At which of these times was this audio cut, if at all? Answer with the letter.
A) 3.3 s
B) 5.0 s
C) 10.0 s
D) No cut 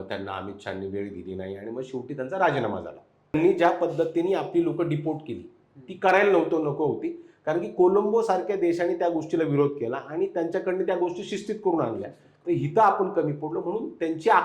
A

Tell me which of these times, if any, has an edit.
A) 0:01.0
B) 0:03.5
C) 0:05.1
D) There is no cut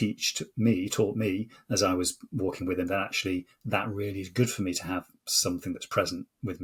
D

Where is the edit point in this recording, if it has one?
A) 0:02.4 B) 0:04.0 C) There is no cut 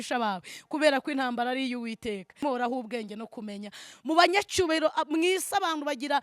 A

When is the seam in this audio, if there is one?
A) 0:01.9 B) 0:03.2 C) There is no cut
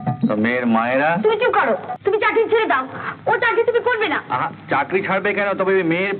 A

